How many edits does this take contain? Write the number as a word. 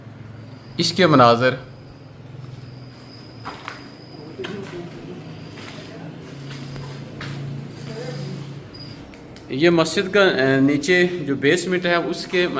one